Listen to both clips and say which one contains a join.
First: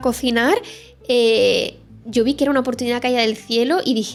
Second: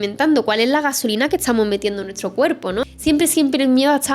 second; 1 cut; at 2.8 s

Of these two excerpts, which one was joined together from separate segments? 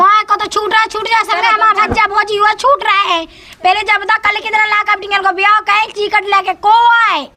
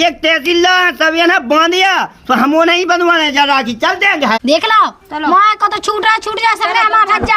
second; 1 cut; at 4.4 s

